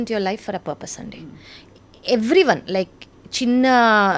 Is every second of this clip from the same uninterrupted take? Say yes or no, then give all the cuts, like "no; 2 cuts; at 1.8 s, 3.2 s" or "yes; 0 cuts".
yes; 0 cuts